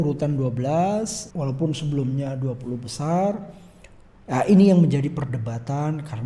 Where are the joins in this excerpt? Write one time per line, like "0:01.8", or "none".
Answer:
0:01.2